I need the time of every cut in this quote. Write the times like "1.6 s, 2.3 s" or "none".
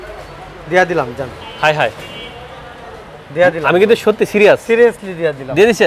none